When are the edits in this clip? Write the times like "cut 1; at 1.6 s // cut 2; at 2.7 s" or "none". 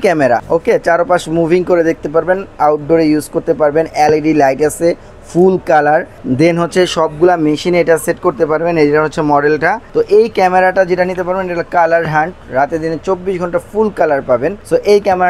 none